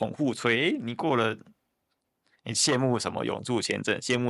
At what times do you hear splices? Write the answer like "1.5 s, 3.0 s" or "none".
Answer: none